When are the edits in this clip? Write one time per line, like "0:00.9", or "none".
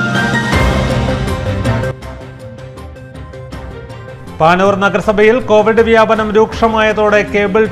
0:02.1
0:03.8